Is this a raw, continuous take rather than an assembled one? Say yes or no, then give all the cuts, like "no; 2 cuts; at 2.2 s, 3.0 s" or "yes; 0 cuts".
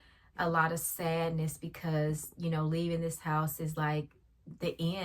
yes; 0 cuts